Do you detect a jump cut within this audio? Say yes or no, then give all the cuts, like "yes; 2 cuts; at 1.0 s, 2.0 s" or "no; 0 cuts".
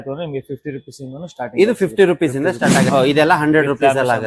yes; 1 cut; at 2.9 s